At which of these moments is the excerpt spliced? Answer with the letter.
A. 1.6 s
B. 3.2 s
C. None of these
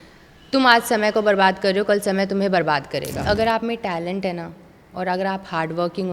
B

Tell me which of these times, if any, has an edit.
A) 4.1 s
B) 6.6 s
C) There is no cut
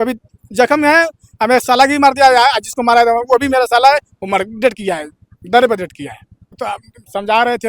B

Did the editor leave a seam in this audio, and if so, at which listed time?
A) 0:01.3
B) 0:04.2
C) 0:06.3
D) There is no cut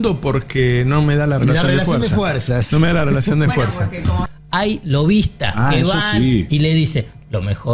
B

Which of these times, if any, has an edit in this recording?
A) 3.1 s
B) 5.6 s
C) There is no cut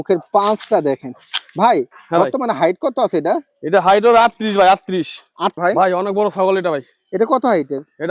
B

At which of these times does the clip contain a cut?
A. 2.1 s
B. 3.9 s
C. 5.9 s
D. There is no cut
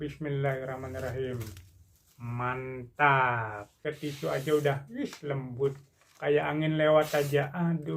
B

